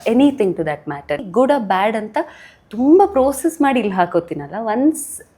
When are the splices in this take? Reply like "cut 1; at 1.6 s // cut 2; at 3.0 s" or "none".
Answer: cut 1; at 1.2 s